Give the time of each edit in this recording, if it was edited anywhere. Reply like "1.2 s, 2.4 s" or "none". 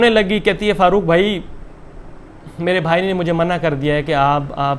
none